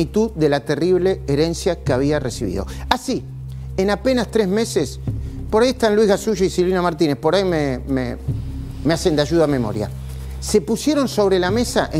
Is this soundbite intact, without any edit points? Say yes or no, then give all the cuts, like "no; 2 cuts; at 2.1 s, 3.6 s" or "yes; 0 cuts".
yes; 0 cuts